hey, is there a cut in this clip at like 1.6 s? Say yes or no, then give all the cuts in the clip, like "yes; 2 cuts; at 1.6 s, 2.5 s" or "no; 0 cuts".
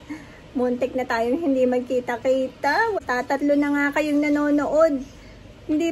no; 1 cut; at 3.0 s